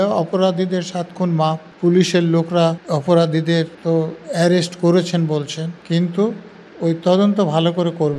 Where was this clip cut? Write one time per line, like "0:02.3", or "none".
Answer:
0:01.7
0:02.8
0:03.7
0:05.8